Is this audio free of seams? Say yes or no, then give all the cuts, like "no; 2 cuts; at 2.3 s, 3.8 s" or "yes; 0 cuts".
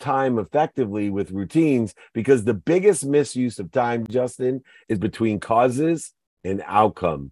no; 1 cut; at 4.1 s